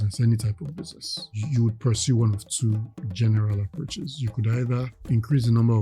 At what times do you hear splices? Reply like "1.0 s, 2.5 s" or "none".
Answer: 1.3 s, 3.0 s, 5.0 s